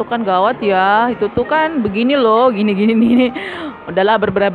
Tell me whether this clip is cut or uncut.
uncut